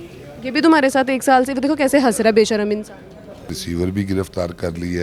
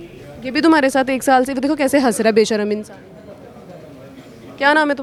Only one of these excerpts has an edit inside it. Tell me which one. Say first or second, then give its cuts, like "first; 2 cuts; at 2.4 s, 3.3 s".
first; 1 cut; at 3.6 s